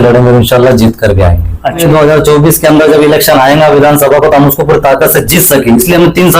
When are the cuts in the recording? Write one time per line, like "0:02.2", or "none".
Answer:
0:01.8

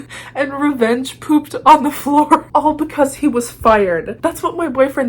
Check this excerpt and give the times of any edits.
0:04.2

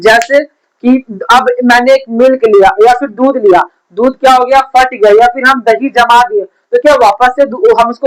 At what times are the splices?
none

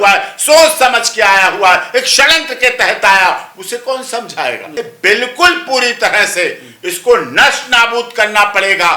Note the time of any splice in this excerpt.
0:04.7

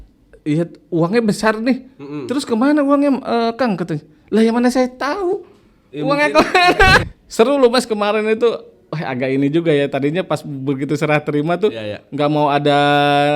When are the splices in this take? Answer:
0:07.0

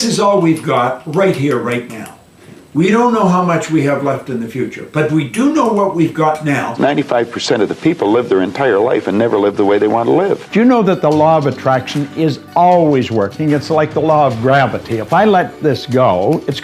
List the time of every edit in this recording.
0:06.7
0:10.5

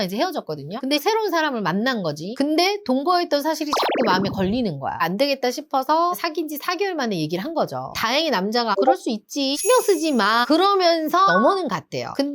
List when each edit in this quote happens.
0:01.0
0:05.0
0:07.9
0:11.3

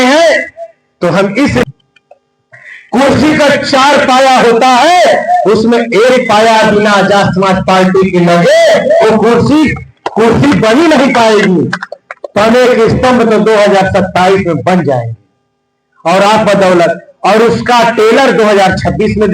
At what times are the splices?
0:01.6

